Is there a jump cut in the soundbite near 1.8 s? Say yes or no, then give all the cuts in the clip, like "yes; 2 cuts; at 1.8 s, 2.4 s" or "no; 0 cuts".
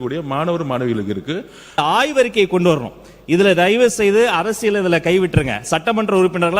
yes; 1 cut; at 1.8 s